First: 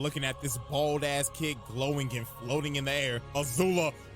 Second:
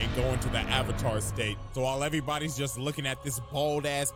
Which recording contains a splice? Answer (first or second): first